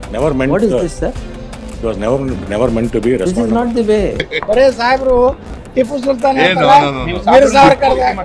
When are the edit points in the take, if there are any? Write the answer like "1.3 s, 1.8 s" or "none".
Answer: 4.1 s